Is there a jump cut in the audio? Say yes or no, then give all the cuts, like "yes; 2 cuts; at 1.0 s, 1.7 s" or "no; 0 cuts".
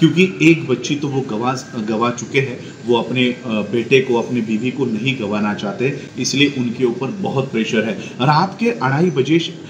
no; 0 cuts